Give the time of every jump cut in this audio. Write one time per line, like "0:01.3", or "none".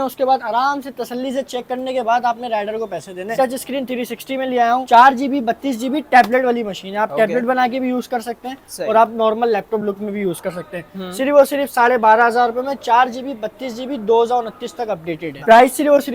none

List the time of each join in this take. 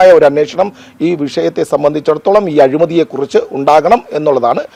none

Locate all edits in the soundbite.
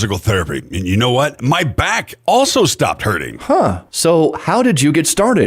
none

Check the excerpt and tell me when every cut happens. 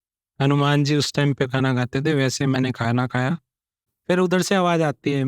0:03.9

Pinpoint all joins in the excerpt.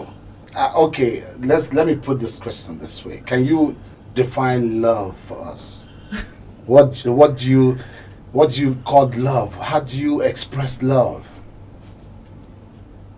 none

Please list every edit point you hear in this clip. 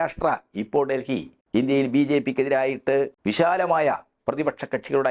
0:01.3
0:03.2

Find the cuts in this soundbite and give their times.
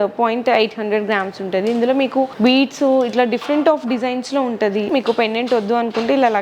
0:02.3
0:04.9

